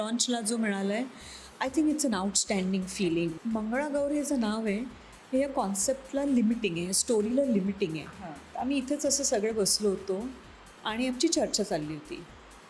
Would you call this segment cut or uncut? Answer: cut